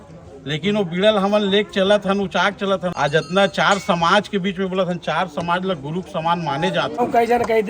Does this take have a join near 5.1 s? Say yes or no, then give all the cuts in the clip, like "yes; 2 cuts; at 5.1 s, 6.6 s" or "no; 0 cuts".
no; 2 cuts; at 2.9 s, 6.9 s